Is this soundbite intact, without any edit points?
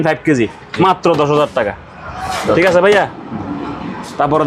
yes; 0 cuts

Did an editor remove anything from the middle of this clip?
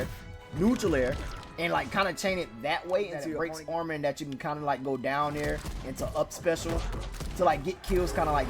yes; 1 cut; at 3.3 s

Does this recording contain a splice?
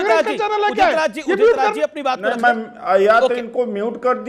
no; 0 cuts

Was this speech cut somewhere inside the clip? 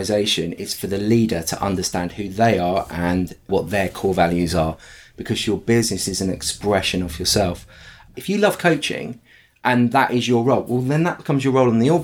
yes; 1 cut; at 8.1 s

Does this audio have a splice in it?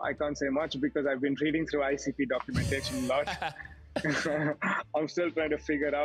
no; 0 cuts

